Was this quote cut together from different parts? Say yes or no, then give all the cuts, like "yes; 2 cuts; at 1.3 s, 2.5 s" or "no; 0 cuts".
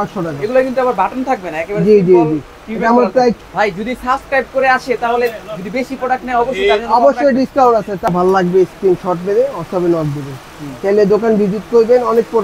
yes; 2 cuts; at 3.4 s, 8.1 s